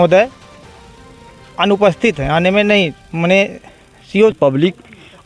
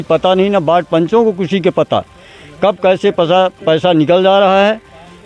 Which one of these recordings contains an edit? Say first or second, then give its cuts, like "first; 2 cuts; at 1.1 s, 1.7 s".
first; 1 cut; at 4.3 s